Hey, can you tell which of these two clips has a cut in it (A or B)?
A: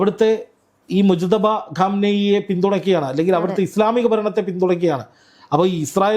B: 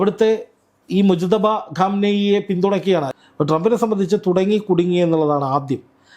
B